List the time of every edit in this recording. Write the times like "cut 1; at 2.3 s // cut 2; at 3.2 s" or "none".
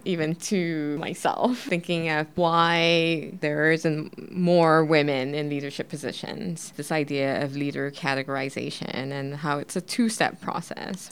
cut 1; at 6.7 s